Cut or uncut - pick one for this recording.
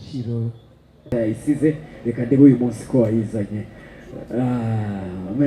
cut